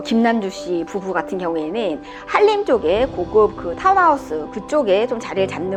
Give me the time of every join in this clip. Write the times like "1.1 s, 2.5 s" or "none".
none